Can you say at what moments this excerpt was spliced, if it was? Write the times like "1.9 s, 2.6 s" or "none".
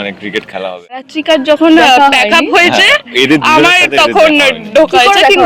1.1 s